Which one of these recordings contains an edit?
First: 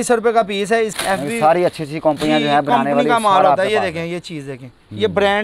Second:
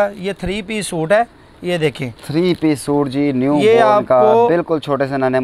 first; 1 cut; at 1.0 s

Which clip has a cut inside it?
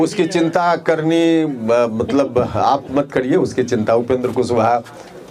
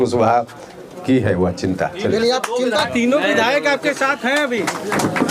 second; 1 cut; at 2.9 s

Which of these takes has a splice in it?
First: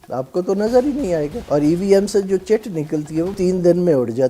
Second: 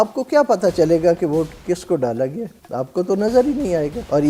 first; 1 cut; at 3.4 s

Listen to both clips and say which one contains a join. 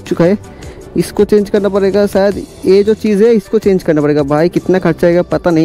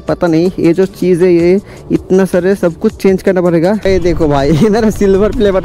second; 1 cut; at 3.8 s

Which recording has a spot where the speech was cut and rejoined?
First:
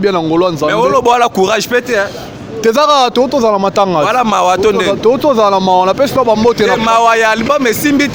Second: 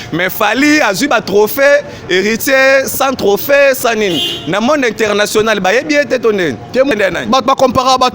second; 1 cut; at 6.9 s

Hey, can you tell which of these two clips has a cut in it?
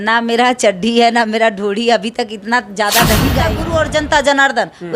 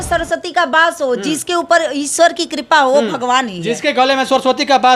first; 1 cut; at 3.6 s

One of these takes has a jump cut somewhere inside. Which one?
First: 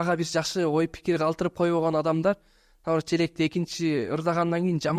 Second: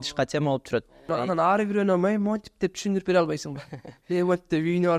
second; 1 cut; at 1.1 s

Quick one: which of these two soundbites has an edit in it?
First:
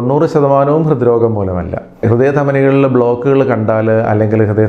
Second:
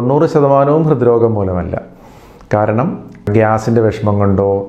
first; 1 cut; at 2.0 s

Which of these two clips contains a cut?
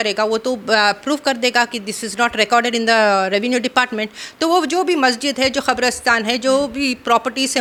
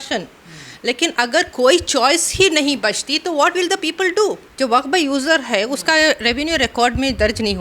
second; 1 cut; at 4.5 s

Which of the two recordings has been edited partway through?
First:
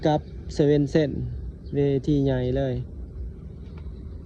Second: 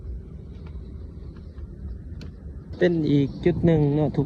second; 1 cut; at 2.7 s

